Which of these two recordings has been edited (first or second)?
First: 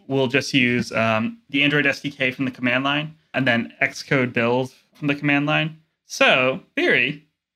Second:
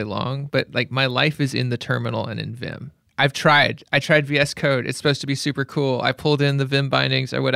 first